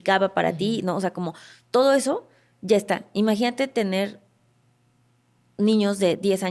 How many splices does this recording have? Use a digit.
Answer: 0